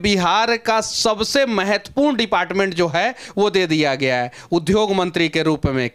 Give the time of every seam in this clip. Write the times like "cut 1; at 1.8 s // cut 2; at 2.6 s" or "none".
none